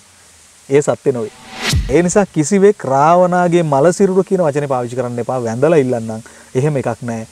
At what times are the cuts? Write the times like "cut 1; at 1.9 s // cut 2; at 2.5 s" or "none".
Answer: cut 1; at 1.8 s